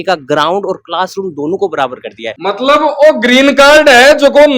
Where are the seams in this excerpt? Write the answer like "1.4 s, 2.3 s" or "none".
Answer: 2.2 s